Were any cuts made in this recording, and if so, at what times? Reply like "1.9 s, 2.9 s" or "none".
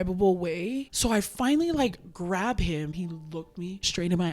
0.9 s, 3.3 s